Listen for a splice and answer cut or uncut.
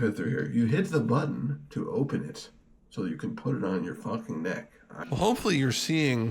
cut